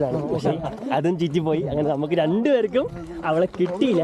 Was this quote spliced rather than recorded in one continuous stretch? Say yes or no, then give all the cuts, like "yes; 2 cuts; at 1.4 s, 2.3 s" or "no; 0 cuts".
no; 0 cuts